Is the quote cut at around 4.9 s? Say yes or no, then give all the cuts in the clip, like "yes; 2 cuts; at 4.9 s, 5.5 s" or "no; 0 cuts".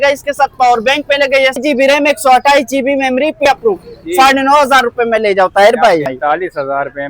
no; 3 cuts; at 1.6 s, 3.4 s, 6.1 s